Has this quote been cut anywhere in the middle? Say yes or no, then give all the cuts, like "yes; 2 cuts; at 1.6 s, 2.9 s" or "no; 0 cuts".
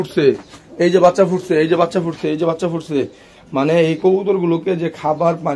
no; 0 cuts